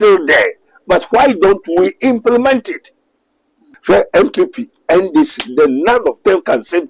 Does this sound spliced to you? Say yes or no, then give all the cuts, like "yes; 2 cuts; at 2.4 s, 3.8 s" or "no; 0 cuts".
yes; 1 cut; at 3.7 s